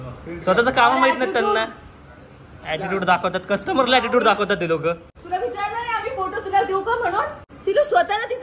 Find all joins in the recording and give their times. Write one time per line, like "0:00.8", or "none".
0:05.1
0:07.4